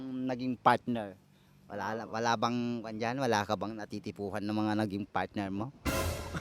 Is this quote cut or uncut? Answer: uncut